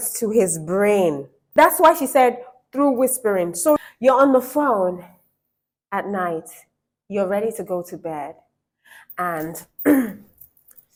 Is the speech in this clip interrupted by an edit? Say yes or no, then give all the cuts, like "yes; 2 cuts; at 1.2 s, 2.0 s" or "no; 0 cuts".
no; 0 cuts